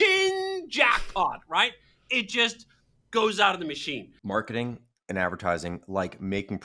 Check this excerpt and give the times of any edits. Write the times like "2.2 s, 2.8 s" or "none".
4.1 s